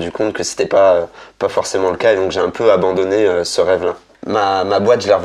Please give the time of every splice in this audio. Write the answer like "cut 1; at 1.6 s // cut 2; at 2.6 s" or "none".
cut 1; at 4.1 s